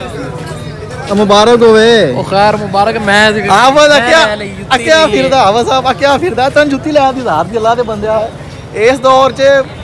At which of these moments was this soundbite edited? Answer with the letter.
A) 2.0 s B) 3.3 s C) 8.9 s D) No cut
D